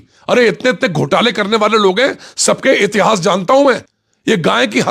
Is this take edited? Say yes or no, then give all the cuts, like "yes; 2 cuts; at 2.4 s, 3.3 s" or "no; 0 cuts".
yes; 1 cut; at 3.9 s